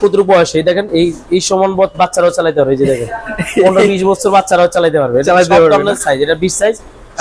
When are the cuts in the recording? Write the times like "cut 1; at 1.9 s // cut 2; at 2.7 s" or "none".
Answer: none

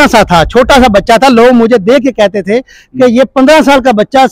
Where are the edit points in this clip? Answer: none

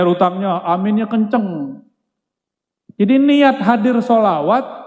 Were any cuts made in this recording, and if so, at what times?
none

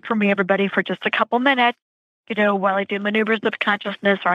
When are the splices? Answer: none

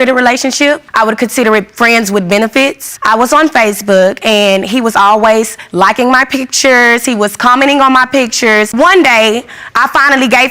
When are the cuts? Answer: cut 1; at 8.7 s

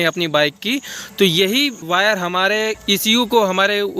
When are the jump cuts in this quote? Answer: cut 1; at 1.8 s // cut 2; at 2.8 s

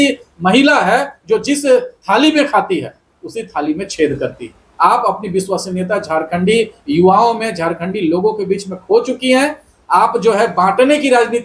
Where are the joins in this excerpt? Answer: none

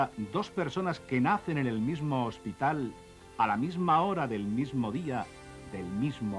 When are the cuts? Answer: none

